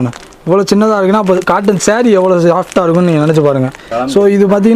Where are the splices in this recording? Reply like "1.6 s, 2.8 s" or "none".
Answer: 3.8 s